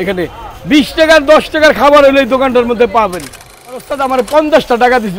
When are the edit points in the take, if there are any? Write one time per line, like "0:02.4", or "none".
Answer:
0:03.7